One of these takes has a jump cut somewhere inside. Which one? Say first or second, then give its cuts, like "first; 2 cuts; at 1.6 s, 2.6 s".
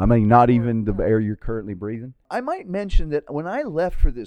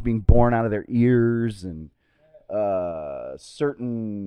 first; 1 cut; at 2.2 s